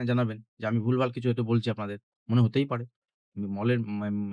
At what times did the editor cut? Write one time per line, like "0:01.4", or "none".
none